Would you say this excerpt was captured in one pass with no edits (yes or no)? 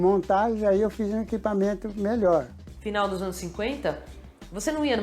no